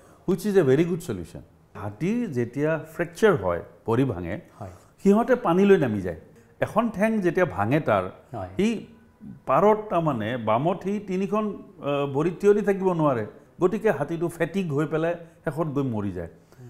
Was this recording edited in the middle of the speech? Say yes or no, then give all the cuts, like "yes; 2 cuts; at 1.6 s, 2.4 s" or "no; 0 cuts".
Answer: yes; 3 cuts; at 1.9 s, 6.3 s, 13.4 s